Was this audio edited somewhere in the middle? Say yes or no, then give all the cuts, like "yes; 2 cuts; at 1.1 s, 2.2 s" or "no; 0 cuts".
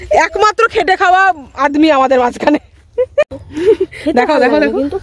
yes; 1 cut; at 3.2 s